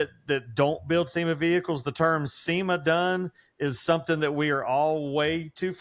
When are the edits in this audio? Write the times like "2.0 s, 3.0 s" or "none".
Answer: none